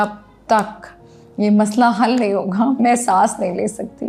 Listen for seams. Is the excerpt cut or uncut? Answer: uncut